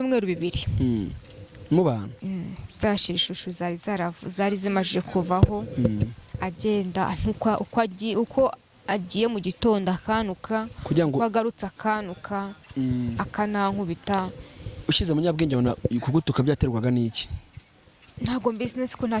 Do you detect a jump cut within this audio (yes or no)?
no